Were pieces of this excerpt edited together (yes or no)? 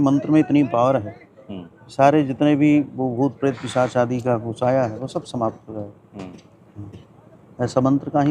no